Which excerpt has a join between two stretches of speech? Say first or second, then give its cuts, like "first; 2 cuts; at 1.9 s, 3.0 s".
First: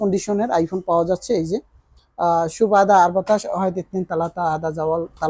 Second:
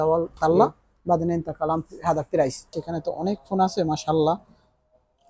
second; 1 cut; at 2.7 s